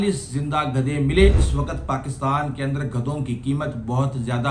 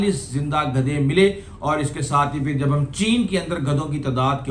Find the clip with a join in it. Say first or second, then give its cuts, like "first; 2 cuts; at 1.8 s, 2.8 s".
first; 1 cut; at 1.4 s